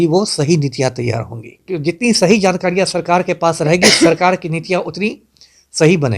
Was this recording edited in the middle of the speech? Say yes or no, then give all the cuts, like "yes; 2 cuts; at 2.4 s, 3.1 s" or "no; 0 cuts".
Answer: yes; 1 cut; at 1.6 s